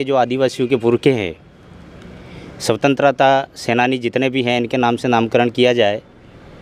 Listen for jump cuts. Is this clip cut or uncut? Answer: uncut